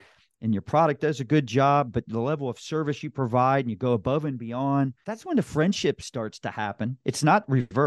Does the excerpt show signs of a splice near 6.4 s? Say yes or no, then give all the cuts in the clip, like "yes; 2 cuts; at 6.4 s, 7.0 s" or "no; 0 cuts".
no; 1 cut; at 5.1 s